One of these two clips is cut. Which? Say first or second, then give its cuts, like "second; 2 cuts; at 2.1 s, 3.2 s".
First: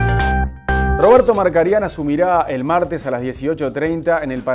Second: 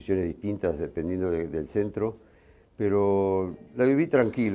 first; 1 cut; at 0.9 s